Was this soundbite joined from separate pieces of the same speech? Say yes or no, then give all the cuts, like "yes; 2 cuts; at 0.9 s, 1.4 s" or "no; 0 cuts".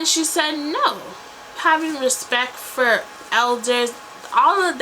yes; 1 cut; at 1.5 s